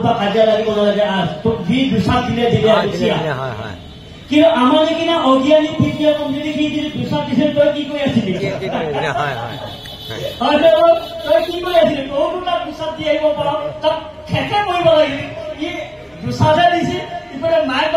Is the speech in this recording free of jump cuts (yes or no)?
yes